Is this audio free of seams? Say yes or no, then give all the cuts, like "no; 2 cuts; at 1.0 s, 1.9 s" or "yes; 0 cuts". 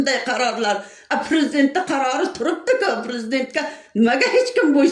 yes; 0 cuts